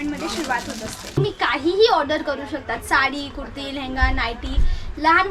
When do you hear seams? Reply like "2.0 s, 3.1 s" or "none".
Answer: 1.2 s